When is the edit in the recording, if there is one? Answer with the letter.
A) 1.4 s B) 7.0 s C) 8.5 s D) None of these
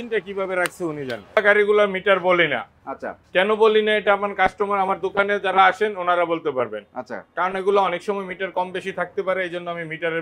A